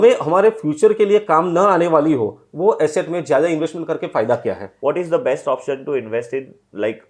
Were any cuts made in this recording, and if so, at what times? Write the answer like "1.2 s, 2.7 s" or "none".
4.7 s